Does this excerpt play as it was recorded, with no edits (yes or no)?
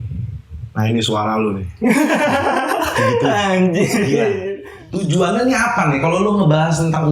no